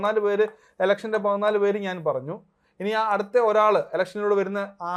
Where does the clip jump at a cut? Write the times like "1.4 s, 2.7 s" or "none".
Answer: none